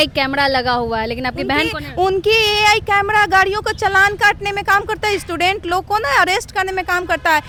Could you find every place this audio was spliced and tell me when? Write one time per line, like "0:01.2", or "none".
none